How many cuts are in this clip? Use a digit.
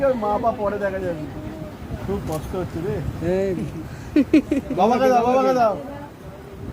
1